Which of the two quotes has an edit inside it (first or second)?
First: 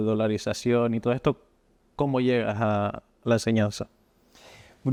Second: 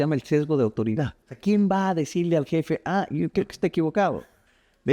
second